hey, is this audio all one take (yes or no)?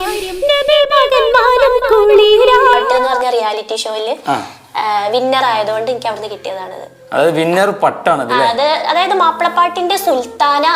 no